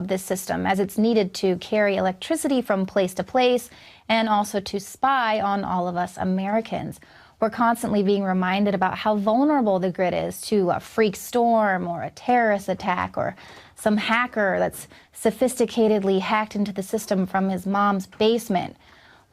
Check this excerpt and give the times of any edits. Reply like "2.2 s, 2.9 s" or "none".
4.4 s